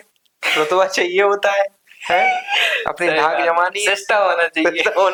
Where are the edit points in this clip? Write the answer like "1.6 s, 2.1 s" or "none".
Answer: none